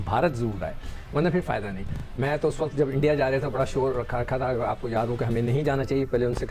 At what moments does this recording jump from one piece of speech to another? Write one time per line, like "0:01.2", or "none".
none